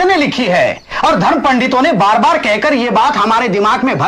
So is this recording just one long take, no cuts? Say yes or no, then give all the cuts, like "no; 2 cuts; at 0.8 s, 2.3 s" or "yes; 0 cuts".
yes; 0 cuts